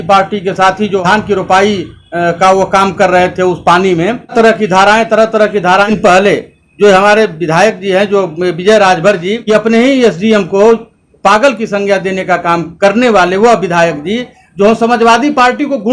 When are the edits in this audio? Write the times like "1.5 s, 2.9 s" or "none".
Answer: 1.0 s, 4.3 s, 5.9 s, 9.4 s